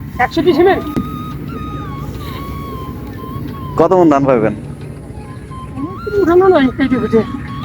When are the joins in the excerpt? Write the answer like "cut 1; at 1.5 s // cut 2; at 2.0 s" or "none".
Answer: cut 1; at 0.9 s